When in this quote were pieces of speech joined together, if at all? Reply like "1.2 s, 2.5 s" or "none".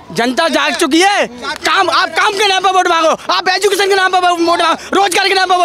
none